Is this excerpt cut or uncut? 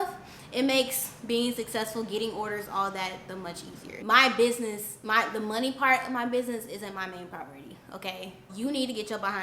cut